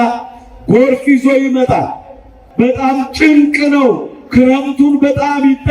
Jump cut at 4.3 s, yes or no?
no